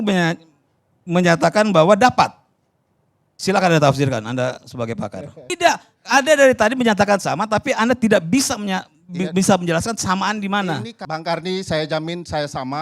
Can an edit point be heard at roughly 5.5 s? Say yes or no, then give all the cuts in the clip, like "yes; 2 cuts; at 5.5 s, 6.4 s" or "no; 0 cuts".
yes; 2 cuts; at 5.5 s, 11.0 s